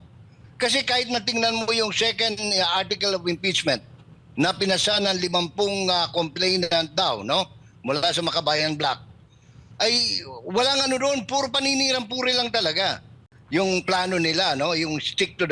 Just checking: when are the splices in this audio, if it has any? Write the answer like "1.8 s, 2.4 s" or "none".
13.3 s